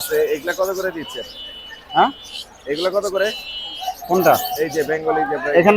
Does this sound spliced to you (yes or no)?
no